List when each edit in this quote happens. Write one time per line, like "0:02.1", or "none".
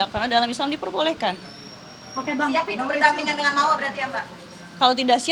none